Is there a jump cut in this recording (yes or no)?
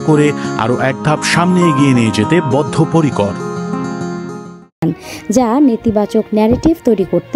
no